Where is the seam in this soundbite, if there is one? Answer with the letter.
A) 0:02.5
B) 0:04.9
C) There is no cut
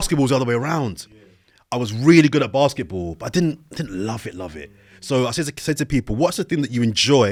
C